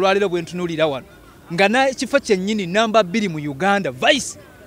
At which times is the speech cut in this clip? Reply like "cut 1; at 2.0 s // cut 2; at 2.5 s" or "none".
none

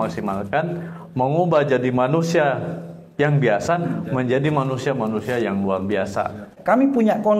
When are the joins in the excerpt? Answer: cut 1; at 6.5 s

